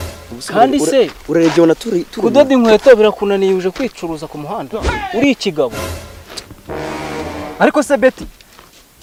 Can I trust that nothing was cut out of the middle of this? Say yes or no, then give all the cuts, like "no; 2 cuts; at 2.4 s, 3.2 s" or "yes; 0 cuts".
yes; 0 cuts